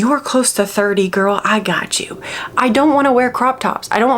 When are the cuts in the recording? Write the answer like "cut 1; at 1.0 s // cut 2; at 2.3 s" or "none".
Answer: none